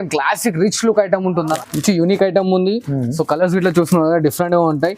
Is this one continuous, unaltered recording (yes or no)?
no